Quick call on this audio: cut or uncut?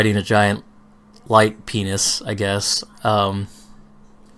uncut